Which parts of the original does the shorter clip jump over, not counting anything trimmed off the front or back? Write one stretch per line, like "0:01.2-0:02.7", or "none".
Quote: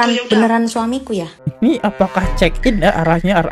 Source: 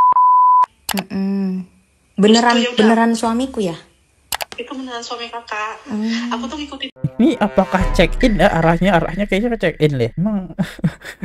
0:03.9-0:07.0